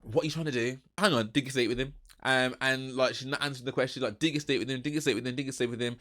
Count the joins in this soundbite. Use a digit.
1